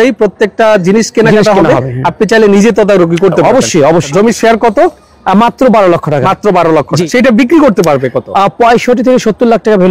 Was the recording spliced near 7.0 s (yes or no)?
yes